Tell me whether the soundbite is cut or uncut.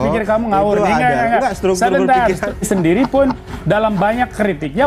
cut